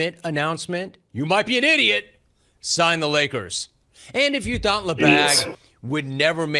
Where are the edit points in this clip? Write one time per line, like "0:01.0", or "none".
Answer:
0:01.0